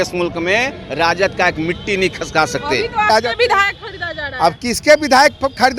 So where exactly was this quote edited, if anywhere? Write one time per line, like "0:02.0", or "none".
0:03.1